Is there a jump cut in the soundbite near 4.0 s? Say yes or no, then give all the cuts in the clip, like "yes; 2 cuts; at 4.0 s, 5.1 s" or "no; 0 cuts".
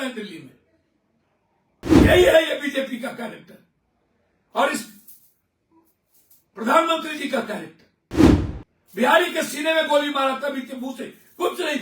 no; 1 cut; at 2.0 s